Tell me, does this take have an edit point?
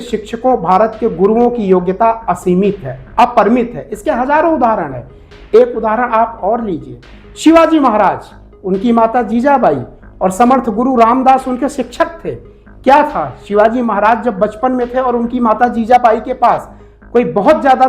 no; 0 cuts

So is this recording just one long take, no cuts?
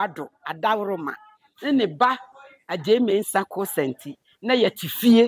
yes; 0 cuts

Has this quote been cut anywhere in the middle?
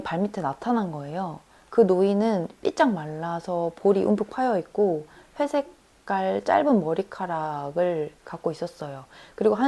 no; 0 cuts

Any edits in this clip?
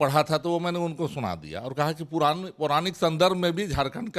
no; 0 cuts

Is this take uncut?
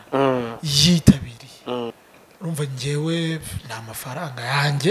no; 1 cut; at 2.0 s

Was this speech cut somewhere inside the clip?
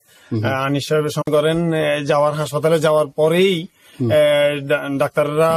yes; 1 cut; at 1.3 s

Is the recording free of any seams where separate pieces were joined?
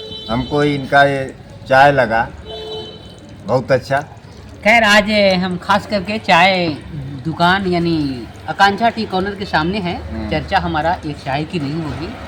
yes; 0 cuts

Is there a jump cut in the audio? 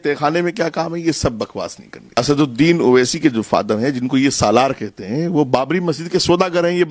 yes; 1 cut; at 2.2 s

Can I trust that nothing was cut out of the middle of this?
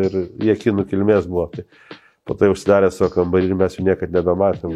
yes; 0 cuts

